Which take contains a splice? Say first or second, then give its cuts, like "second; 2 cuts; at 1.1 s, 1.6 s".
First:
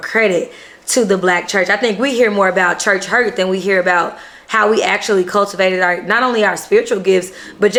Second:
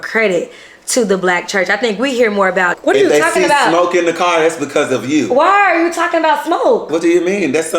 second; 1 cut; at 2.8 s